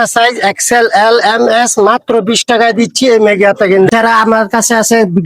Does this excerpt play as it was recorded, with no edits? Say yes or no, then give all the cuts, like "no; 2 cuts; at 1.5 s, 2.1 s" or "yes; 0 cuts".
no; 1 cut; at 3.9 s